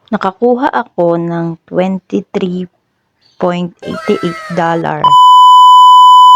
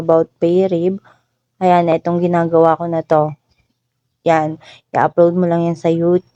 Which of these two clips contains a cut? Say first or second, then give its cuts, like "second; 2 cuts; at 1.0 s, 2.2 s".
first; 1 cut; at 1.1 s